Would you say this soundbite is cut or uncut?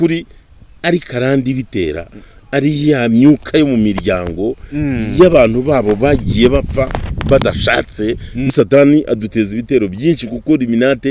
cut